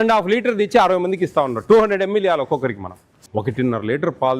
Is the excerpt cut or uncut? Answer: cut